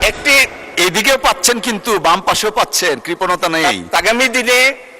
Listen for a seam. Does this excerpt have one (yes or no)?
yes